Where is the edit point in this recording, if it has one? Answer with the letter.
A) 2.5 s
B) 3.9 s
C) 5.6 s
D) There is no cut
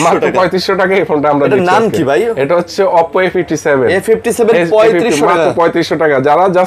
D